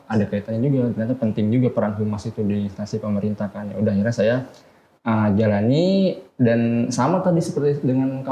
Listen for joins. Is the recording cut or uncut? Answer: uncut